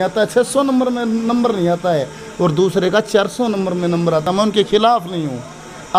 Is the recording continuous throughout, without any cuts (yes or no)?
yes